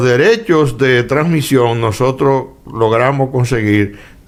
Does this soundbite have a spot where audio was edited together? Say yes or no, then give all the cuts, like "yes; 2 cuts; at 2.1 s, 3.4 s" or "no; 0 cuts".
no; 0 cuts